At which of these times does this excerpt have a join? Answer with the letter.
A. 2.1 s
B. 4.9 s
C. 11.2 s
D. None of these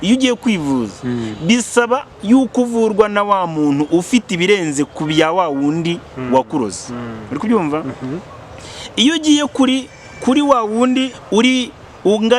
C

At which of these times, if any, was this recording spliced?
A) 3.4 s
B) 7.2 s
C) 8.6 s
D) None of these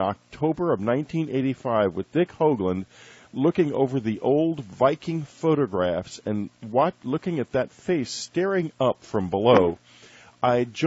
C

